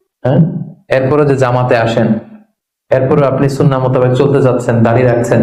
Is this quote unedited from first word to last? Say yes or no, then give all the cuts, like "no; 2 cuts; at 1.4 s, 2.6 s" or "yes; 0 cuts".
yes; 0 cuts